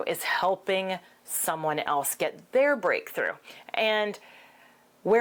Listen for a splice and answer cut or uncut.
uncut